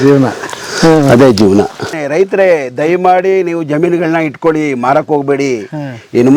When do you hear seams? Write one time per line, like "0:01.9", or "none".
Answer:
0:02.0